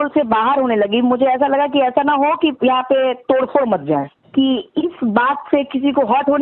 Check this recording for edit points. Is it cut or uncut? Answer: cut